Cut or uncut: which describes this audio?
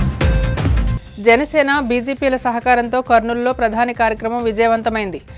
cut